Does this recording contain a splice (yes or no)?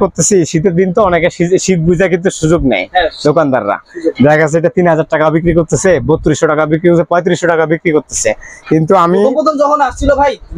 no